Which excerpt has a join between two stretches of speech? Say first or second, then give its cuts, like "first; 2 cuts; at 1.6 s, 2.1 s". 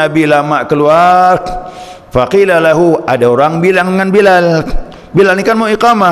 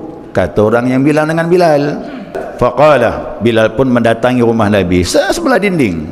second; 1 cut; at 2.4 s